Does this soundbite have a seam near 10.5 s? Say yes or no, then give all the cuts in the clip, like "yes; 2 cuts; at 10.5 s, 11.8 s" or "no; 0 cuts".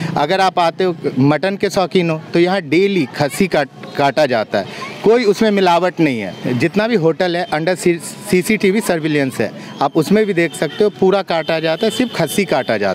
no; 1 cut; at 6.3 s